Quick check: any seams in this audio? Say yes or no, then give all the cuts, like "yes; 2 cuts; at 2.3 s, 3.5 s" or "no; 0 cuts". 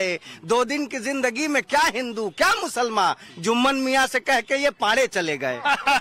yes; 1 cut; at 5.1 s